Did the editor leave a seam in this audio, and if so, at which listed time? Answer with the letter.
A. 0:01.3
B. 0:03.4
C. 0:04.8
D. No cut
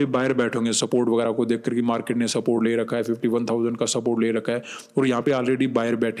B